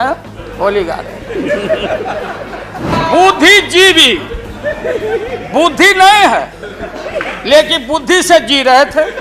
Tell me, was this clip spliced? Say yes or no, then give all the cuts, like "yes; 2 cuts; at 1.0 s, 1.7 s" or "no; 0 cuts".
yes; 1 cut; at 2.9 s